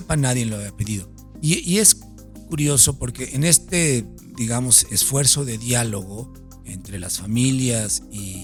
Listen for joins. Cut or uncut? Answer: uncut